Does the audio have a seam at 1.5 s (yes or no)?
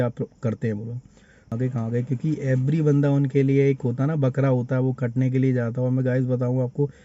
yes